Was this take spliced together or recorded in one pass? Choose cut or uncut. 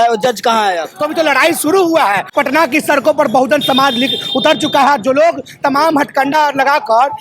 cut